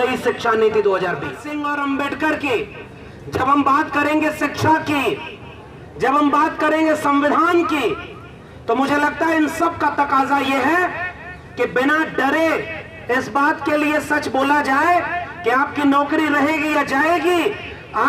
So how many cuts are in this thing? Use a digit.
1